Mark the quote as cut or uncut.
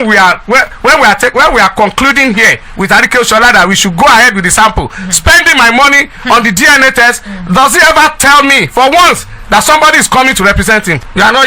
uncut